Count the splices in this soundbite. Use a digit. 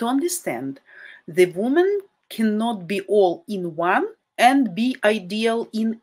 1